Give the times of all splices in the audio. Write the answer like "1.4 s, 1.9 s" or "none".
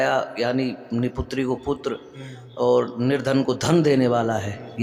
none